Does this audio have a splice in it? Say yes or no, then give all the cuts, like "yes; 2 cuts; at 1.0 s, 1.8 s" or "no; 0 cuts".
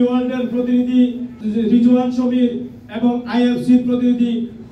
yes; 1 cut; at 1.4 s